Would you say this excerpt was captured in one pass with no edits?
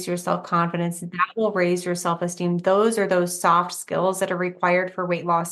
yes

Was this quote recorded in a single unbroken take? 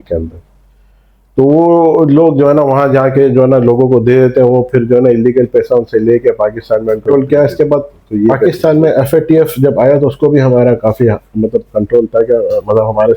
no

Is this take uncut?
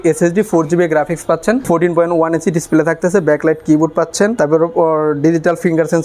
no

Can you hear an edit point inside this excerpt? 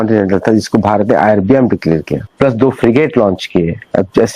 yes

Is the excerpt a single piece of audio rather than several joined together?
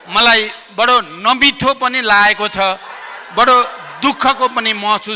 yes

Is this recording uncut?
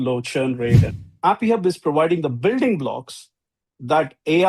no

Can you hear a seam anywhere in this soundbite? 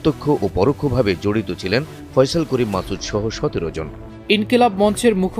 yes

